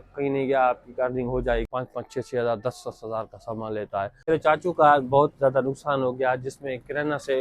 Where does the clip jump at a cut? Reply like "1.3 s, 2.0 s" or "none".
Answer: 1.7 s, 4.2 s